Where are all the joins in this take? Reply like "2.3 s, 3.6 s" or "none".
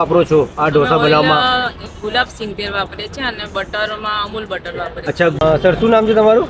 5.4 s